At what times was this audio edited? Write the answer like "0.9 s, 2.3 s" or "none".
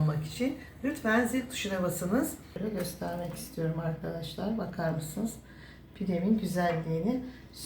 2.6 s

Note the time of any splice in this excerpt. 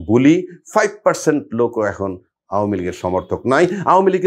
none

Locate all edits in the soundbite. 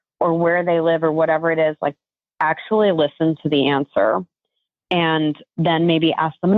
none

